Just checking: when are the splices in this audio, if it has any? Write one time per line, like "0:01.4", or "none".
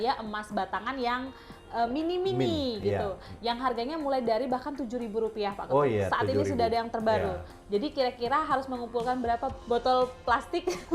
0:07.5
0:09.6